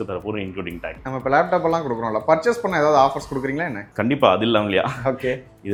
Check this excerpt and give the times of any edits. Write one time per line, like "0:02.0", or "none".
none